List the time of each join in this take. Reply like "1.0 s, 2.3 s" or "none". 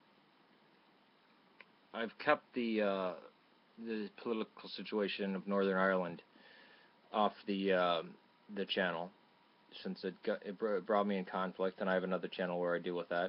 10.9 s

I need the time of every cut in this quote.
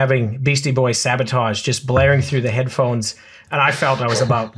none

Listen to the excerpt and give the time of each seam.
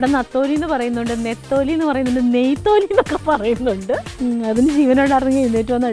4.1 s

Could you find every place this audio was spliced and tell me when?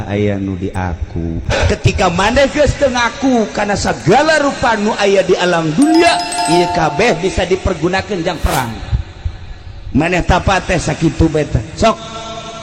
1.5 s

